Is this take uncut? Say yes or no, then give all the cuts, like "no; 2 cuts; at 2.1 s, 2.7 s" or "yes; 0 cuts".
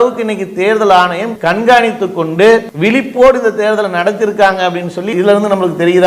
no; 1 cut; at 5.1 s